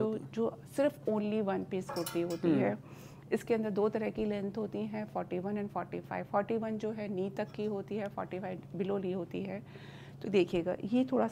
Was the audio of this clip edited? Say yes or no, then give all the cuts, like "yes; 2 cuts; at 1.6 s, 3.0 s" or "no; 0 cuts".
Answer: no; 0 cuts